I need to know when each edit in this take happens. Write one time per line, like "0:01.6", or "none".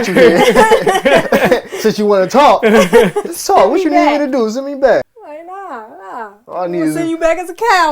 0:05.1